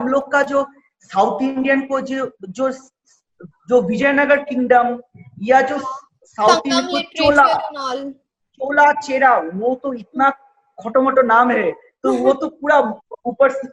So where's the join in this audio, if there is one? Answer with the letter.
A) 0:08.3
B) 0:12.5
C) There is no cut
C